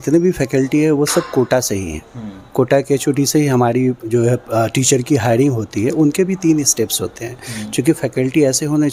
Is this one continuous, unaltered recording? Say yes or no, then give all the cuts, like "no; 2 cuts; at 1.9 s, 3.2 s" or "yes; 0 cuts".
yes; 0 cuts